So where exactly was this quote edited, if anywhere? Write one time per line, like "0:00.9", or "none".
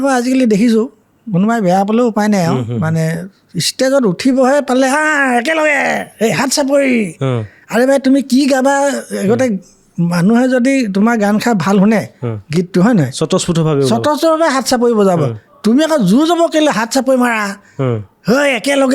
none